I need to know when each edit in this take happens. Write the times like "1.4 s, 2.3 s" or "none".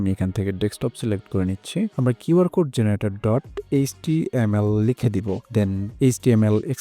1.9 s